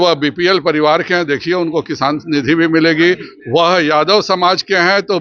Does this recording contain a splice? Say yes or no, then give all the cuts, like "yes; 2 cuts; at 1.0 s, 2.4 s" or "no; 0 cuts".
no; 0 cuts